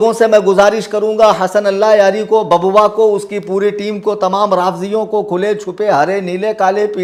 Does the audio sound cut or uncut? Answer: uncut